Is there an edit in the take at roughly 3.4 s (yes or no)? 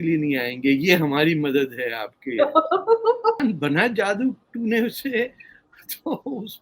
yes